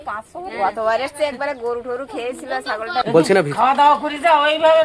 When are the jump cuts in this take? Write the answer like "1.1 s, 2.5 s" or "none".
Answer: 3.0 s